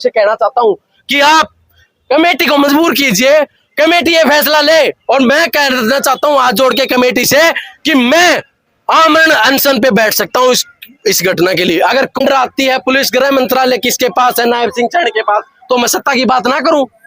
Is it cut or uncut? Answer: cut